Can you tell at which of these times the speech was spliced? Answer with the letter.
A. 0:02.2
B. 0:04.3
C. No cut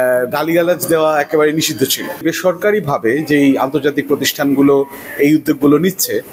A